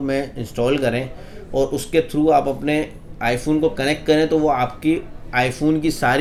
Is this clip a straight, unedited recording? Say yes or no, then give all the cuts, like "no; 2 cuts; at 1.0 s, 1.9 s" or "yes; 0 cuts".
yes; 0 cuts